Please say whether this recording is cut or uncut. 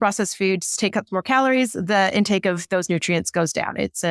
uncut